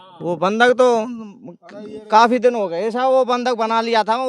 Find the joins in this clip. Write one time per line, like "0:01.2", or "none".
none